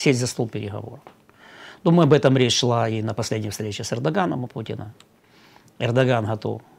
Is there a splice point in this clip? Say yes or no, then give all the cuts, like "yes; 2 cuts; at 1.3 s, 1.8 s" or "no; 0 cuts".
no; 0 cuts